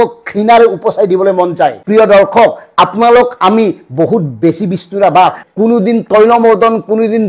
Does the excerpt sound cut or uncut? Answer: cut